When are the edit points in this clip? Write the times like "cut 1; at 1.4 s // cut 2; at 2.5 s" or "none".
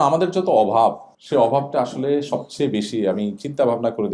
cut 1; at 1.1 s